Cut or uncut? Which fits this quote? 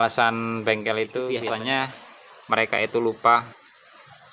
cut